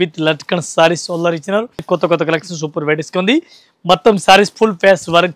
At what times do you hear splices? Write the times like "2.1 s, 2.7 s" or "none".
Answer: 1.8 s